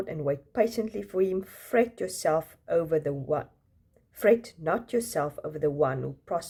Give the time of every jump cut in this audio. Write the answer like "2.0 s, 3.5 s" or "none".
none

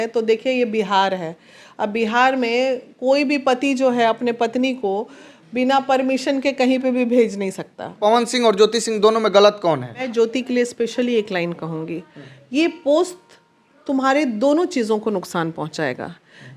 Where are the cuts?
7.9 s, 10.0 s

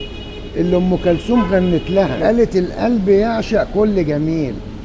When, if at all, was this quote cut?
none

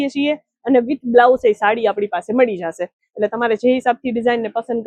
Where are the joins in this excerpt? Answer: none

